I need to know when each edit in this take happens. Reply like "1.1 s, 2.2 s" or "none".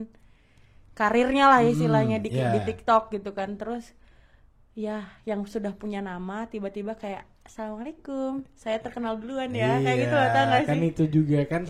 none